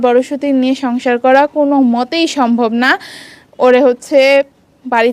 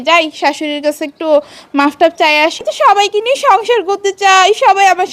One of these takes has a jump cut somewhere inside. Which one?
second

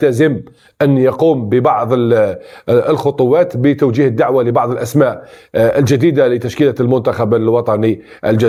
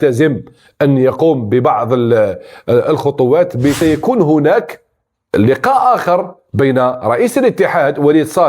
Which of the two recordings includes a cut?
second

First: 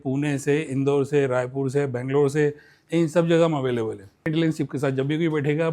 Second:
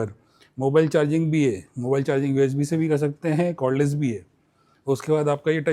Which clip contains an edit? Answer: first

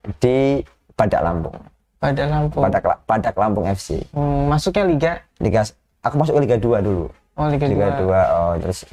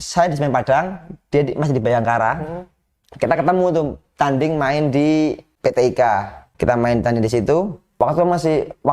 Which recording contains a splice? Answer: second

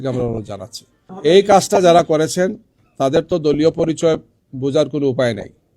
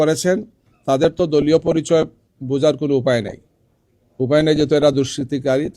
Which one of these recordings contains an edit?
first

